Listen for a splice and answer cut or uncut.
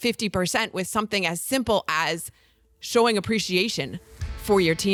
uncut